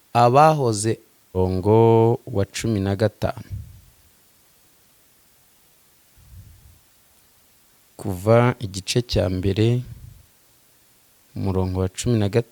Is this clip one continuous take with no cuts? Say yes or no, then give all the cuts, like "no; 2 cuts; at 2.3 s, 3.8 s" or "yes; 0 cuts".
no; 1 cut; at 1.4 s